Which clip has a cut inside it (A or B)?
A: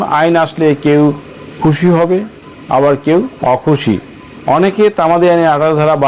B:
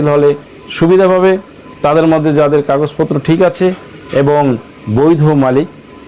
A